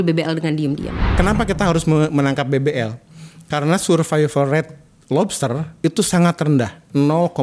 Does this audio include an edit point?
yes; 1 cut; at 1.1 s

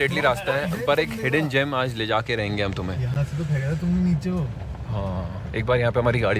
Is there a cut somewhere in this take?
no; 0 cuts

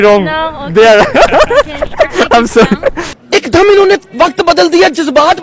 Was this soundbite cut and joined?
no; 0 cuts

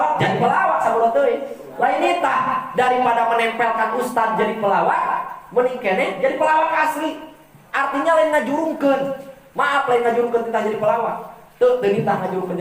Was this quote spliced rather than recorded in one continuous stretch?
no; 0 cuts

